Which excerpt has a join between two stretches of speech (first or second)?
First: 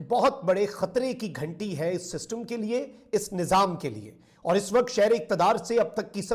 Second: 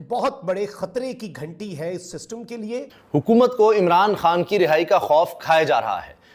second